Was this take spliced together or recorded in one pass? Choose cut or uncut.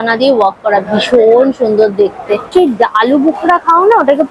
cut